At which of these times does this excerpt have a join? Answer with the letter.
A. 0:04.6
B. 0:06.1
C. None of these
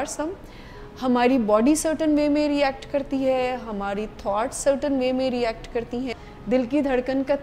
B